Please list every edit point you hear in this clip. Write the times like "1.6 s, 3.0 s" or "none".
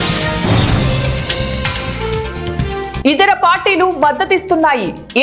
none